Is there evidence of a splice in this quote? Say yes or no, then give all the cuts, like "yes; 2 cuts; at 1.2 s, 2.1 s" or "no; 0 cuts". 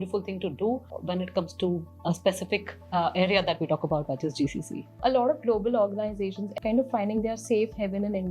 yes; 1 cut; at 5.0 s